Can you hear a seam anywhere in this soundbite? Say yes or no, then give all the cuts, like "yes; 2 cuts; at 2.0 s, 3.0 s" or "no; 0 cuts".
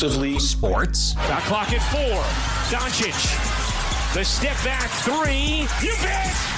no; 0 cuts